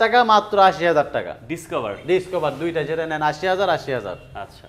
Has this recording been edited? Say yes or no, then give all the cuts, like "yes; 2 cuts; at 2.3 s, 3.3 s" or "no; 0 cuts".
no; 0 cuts